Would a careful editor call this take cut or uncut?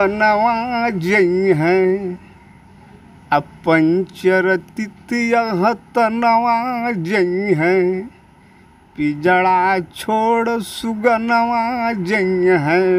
uncut